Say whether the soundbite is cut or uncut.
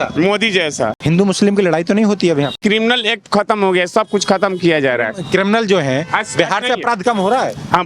cut